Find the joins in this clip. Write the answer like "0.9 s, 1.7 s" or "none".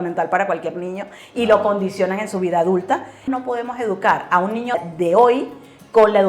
3.2 s, 4.8 s